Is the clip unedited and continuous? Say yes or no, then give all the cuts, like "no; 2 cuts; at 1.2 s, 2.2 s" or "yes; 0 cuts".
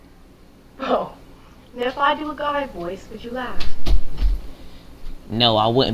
yes; 0 cuts